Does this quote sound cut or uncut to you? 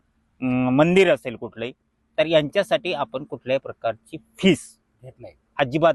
uncut